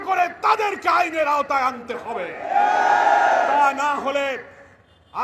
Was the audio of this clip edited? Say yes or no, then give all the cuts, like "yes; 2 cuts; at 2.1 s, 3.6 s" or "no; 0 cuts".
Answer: no; 0 cuts